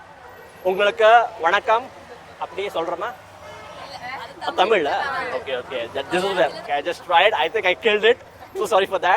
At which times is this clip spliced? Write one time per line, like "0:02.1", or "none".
0:06.6